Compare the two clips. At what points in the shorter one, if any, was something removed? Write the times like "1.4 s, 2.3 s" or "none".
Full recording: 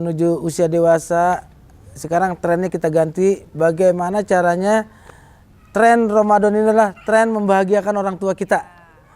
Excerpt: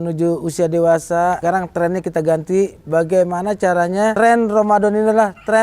1.4 s, 4.1 s